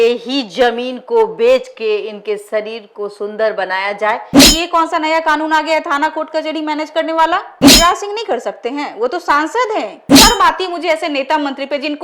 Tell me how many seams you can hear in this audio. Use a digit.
3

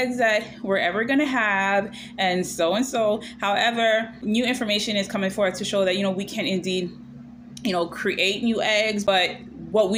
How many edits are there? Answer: 0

